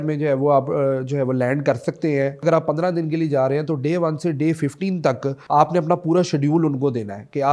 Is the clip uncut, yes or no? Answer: no